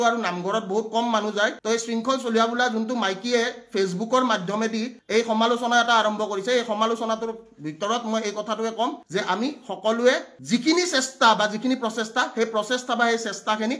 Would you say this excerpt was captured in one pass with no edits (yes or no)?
yes